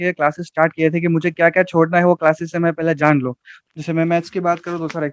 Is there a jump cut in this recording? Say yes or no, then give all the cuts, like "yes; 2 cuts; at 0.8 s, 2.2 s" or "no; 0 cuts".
yes; 1 cut; at 3.6 s